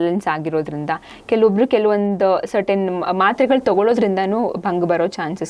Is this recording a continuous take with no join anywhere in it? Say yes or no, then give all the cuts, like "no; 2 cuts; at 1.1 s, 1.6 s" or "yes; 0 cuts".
yes; 0 cuts